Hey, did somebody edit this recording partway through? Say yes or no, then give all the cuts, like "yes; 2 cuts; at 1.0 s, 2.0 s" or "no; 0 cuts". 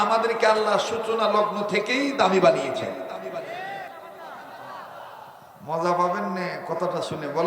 yes; 1 cut; at 4.1 s